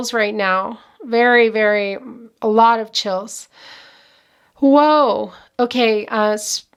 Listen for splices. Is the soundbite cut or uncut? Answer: uncut